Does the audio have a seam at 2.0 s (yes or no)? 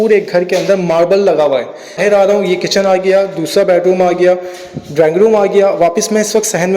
yes